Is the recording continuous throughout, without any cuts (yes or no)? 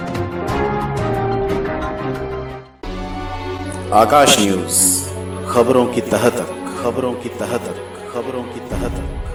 yes